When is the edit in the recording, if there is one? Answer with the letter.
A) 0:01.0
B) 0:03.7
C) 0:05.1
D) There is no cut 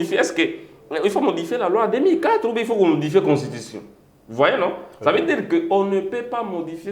D